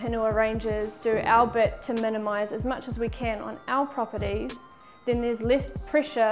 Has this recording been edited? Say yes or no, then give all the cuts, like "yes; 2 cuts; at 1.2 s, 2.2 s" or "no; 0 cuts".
no; 0 cuts